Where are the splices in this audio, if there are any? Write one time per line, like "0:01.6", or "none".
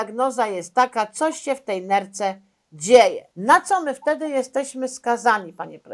0:03.3